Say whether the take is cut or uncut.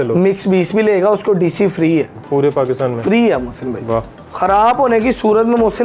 cut